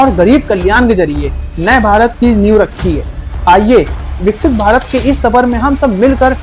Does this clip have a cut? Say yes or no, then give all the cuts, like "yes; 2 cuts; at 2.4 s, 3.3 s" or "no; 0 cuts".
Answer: no; 0 cuts